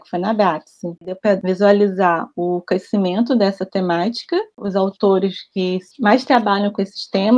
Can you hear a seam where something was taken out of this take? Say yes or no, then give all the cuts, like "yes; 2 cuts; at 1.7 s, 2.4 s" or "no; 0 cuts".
yes; 2 cuts; at 1.3 s, 4.6 s